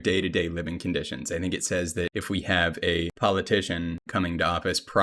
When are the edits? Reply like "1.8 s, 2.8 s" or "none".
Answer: 2.2 s, 3.1 s, 4.0 s